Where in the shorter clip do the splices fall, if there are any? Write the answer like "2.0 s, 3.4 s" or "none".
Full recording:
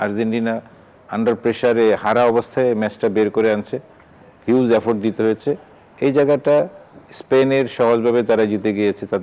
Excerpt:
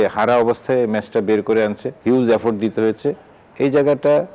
1.9 s